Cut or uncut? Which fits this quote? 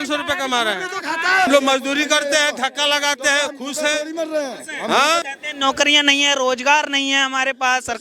cut